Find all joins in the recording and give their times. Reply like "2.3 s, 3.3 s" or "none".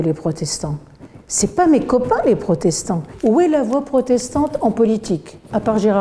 3.1 s